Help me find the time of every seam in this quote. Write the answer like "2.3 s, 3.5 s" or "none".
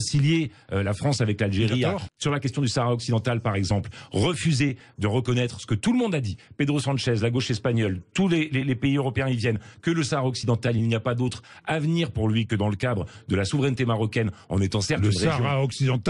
2.1 s